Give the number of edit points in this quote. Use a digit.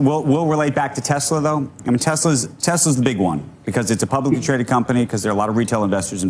0